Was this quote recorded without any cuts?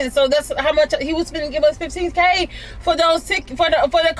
yes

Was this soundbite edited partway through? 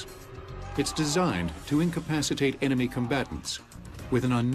no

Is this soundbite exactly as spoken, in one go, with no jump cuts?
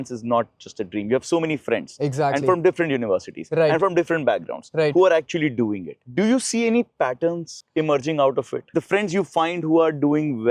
yes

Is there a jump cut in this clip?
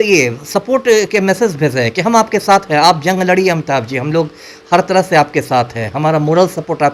no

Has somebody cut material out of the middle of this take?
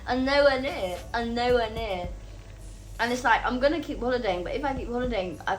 no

